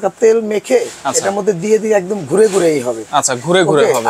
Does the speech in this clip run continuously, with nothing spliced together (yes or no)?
yes